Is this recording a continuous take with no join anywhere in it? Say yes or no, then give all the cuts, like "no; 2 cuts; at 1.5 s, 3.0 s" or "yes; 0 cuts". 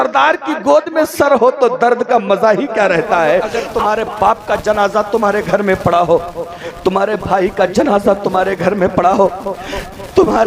no; 1 cut; at 3.6 s